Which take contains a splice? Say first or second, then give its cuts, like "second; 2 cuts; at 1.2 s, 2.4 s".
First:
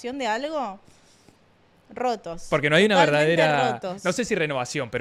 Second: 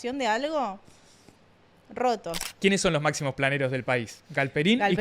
second; 1 cut; at 2.4 s